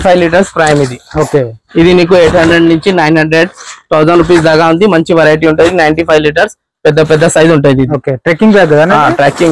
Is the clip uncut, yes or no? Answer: yes